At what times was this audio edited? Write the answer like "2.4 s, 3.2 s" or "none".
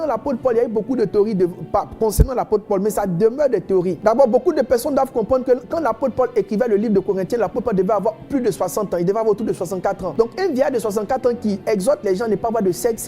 4.0 s, 10.1 s